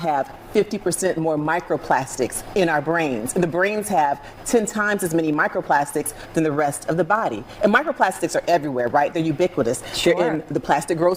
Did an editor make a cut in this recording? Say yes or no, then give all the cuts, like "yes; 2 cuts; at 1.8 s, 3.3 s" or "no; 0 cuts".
no; 0 cuts